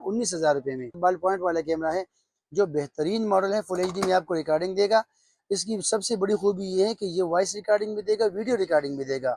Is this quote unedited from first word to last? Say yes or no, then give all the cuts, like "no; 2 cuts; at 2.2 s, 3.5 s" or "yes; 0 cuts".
no; 1 cut; at 1.0 s